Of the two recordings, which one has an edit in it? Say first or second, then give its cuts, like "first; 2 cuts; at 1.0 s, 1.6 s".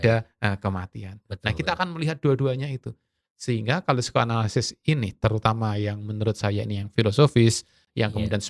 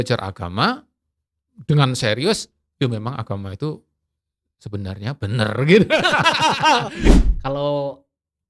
second; 1 cut; at 7.0 s